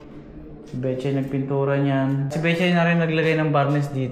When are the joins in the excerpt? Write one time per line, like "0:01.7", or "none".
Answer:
0:02.3